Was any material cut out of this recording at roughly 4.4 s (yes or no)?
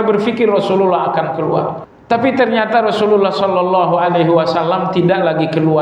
no